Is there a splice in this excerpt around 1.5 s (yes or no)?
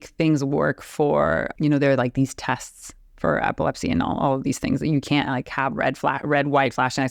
yes